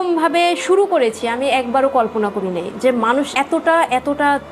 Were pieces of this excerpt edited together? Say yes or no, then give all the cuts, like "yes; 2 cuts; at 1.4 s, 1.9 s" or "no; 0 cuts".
no; 0 cuts